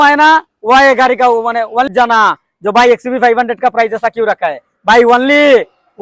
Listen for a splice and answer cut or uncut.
cut